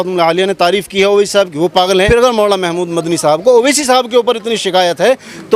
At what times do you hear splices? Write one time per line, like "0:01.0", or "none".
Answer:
0:02.1